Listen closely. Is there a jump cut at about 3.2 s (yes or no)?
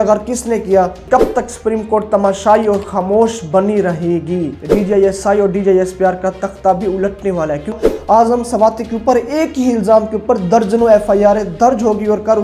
no